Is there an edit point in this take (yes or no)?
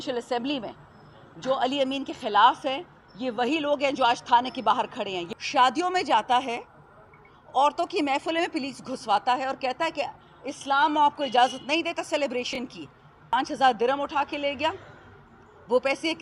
yes